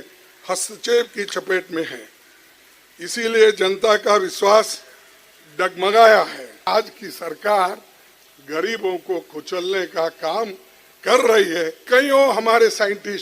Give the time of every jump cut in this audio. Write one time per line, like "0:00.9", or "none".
0:06.5
0:11.8